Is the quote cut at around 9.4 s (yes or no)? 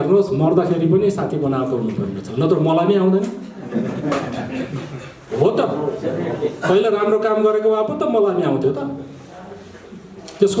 no